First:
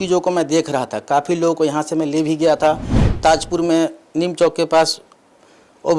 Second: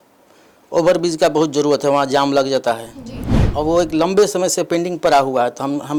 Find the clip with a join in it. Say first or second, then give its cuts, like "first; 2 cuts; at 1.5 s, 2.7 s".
first; 1 cut; at 3.0 s